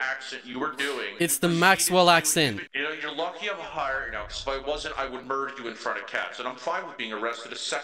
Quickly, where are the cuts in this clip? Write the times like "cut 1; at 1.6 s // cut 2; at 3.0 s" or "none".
none